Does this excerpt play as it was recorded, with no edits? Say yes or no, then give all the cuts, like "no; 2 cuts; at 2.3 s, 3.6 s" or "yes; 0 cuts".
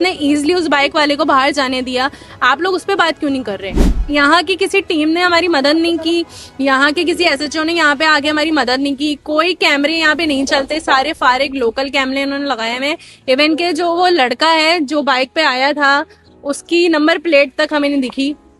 no; 1 cut; at 3.7 s